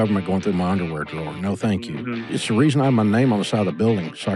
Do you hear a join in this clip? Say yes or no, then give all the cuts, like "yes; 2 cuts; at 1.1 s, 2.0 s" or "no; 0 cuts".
yes; 1 cut; at 2.3 s